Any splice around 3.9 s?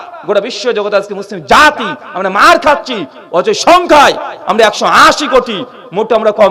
no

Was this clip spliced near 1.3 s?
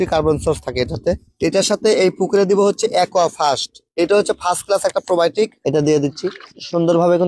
yes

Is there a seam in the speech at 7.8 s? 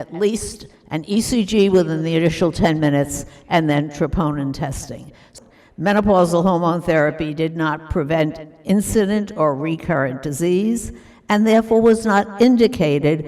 no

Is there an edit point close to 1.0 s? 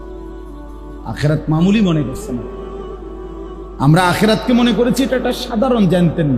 yes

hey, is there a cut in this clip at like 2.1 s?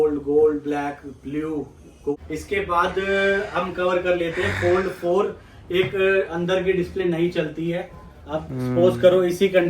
yes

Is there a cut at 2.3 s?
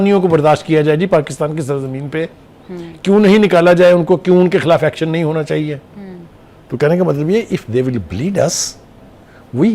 no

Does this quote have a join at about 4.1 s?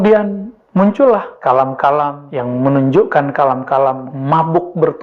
yes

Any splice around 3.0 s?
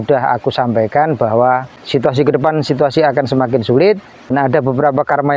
no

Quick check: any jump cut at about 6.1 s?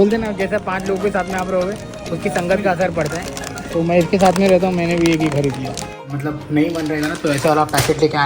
yes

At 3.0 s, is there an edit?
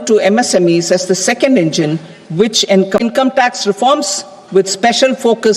yes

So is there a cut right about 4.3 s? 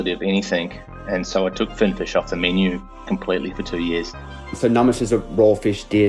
yes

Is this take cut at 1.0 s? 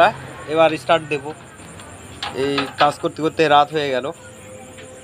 no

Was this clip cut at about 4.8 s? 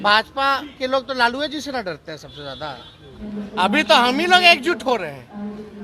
no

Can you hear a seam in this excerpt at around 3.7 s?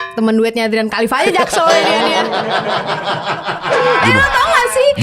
yes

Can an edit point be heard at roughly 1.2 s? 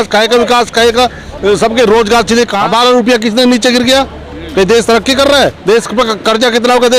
no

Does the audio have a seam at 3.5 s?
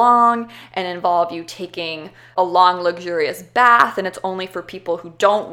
no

